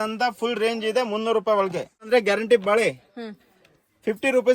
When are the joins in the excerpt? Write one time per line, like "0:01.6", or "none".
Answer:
0:02.1